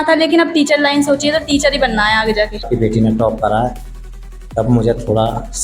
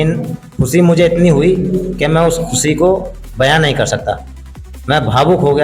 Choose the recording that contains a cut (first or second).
first